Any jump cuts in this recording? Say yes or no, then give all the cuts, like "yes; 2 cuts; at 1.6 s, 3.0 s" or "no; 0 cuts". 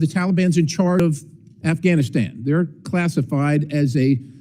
yes; 1 cut; at 1.0 s